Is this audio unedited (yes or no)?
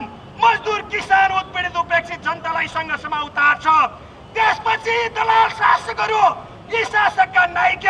yes